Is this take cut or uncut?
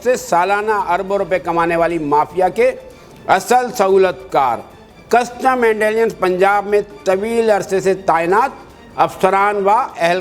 uncut